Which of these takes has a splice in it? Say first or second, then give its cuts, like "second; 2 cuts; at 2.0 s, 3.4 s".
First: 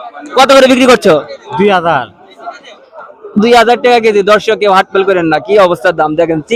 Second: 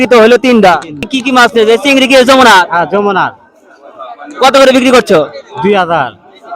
second; 1 cut; at 1.1 s